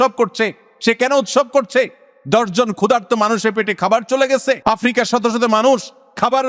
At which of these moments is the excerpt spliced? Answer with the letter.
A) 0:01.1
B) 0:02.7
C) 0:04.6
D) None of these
C